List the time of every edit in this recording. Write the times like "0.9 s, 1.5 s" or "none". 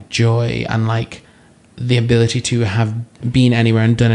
3.2 s